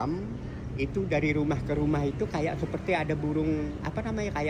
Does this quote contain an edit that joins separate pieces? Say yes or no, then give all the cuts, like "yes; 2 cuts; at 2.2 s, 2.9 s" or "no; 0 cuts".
no; 0 cuts